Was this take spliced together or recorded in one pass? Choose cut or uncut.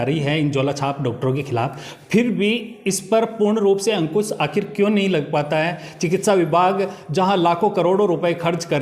uncut